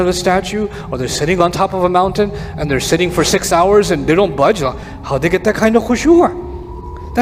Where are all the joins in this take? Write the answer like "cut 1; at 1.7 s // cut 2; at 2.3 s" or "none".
none